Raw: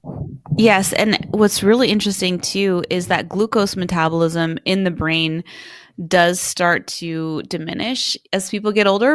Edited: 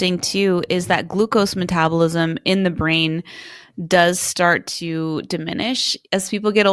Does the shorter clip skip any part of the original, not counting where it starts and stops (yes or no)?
no